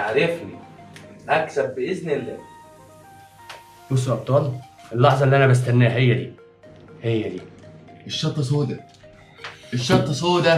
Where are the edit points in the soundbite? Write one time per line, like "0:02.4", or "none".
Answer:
none